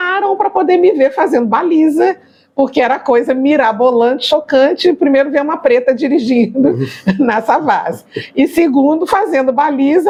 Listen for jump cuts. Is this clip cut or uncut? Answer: uncut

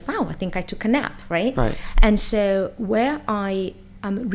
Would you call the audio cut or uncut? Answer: uncut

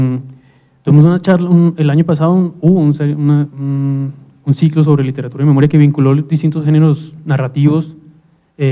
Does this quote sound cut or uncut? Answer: cut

